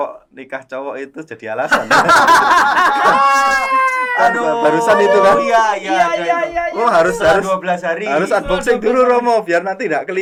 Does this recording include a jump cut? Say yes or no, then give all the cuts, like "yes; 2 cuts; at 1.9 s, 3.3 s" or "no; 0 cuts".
no; 0 cuts